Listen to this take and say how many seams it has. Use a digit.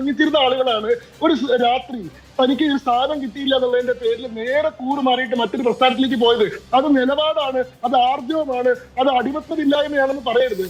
0